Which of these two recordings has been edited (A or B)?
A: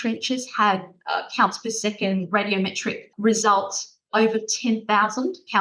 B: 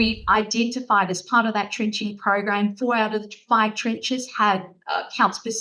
A